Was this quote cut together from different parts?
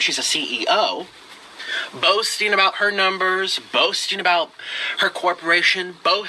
no; 0 cuts

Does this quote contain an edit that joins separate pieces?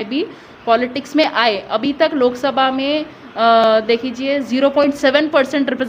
no; 0 cuts

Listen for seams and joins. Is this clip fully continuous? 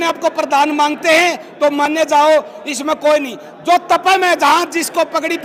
yes; 0 cuts

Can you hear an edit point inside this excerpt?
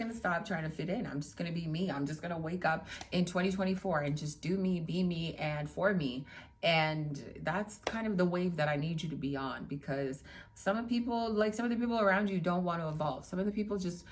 no; 0 cuts

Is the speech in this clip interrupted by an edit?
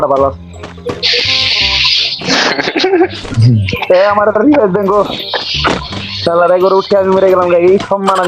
no; 0 cuts

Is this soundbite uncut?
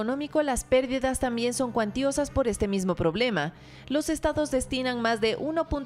yes; 0 cuts

